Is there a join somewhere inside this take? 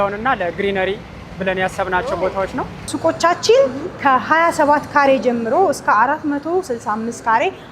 yes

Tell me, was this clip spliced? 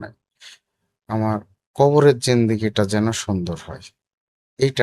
no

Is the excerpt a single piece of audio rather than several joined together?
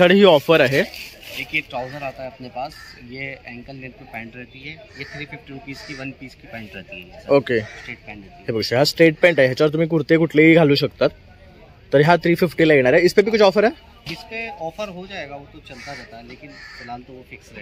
yes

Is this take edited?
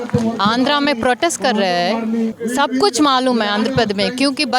yes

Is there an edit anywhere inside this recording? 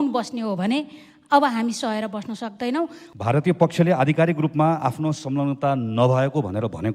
yes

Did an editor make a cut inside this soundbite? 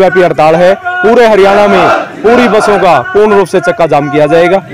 no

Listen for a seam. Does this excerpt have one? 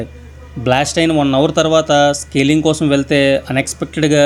no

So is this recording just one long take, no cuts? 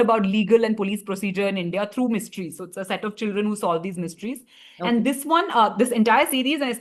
yes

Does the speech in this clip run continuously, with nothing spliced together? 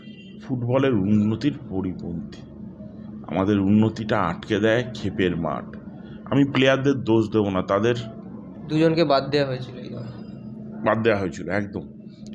yes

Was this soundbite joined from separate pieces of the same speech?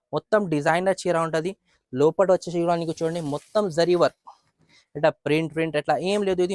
no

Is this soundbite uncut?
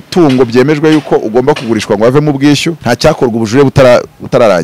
no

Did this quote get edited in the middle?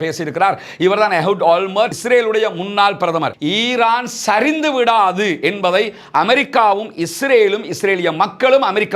yes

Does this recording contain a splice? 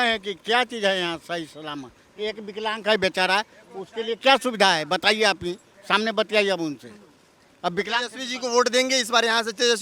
no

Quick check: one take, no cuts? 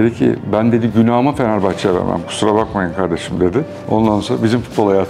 no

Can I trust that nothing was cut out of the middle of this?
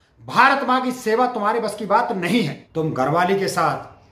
no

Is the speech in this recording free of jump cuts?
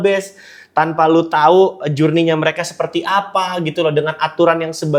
yes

